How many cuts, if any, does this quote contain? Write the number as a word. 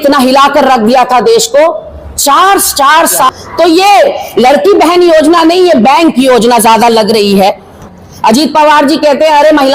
two